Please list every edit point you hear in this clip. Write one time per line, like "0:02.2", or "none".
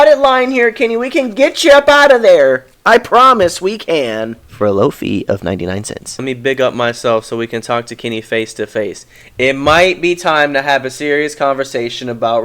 0:06.2